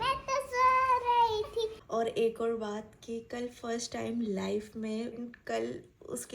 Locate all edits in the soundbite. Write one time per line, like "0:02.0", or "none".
0:01.8
0:05.2